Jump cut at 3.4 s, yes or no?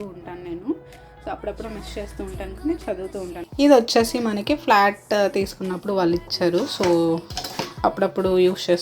yes